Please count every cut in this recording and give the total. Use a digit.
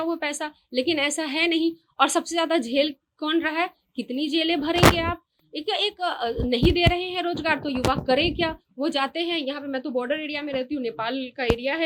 0